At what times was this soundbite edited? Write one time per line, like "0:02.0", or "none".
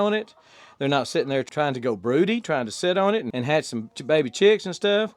0:01.5